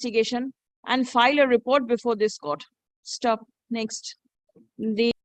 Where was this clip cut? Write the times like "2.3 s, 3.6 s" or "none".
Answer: none